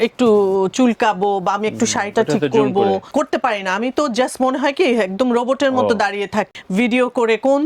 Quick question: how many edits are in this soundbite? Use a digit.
2